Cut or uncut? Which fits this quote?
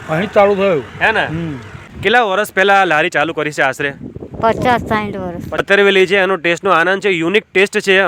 cut